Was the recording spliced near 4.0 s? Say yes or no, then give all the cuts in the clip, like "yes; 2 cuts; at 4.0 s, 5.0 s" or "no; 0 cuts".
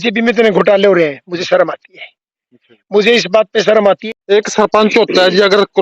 yes; 1 cut; at 4.0 s